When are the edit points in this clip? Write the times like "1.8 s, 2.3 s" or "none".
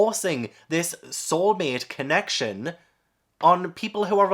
none